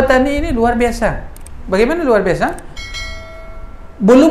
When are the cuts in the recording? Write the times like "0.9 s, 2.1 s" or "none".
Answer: none